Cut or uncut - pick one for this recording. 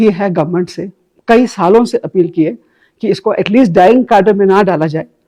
uncut